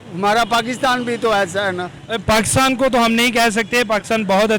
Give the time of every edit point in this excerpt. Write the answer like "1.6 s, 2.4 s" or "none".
none